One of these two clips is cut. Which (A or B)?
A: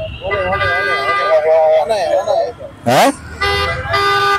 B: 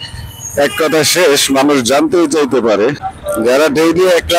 B